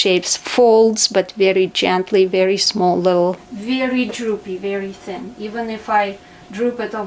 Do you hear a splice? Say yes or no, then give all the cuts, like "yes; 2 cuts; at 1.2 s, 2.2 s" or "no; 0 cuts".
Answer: yes; 1 cut; at 3.5 s